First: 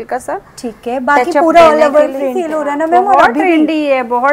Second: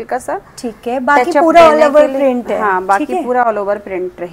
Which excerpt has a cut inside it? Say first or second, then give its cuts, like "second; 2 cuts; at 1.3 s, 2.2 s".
first; 1 cut; at 2.3 s